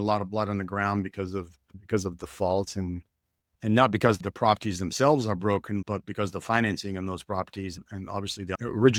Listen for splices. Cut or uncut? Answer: uncut